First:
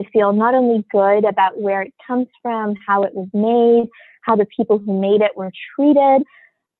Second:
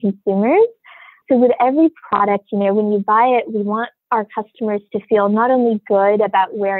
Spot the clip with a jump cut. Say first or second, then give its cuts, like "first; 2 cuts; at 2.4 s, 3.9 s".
second; 2 cuts; at 1.2 s, 4.0 s